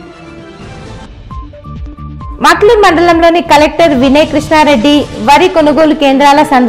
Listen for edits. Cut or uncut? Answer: cut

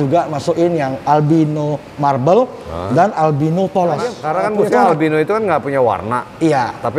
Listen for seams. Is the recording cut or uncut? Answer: cut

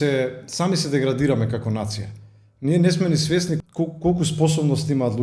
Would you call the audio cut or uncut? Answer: cut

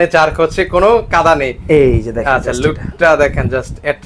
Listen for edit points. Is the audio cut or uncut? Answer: uncut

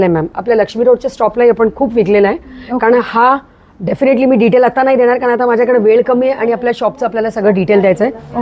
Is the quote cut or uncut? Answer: uncut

